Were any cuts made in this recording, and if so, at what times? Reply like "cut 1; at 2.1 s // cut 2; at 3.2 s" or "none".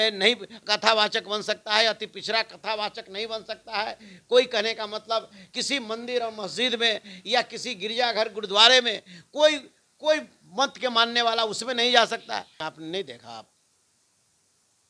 cut 1; at 12.6 s